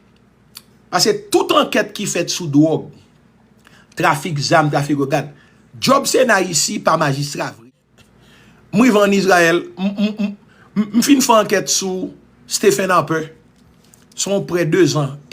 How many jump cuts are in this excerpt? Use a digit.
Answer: 1